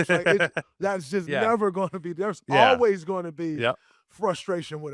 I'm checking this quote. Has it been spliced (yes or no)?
no